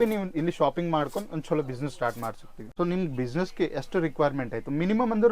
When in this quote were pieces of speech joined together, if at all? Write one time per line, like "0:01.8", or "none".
0:02.6